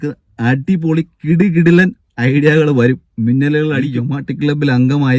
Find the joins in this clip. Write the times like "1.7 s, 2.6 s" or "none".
4.0 s